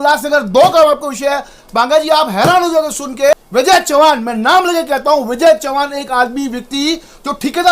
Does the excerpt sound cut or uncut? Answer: cut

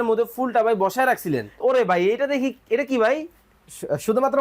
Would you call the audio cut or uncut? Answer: cut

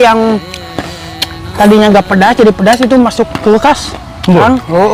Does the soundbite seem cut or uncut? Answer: uncut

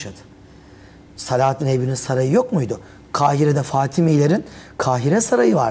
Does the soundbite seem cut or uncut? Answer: uncut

